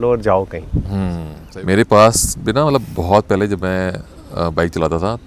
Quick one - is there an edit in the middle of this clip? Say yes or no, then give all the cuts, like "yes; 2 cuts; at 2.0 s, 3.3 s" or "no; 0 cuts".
yes; 1 cut; at 1.3 s